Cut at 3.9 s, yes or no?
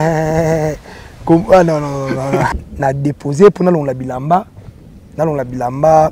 no